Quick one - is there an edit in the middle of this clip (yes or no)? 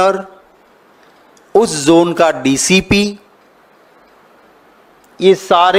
no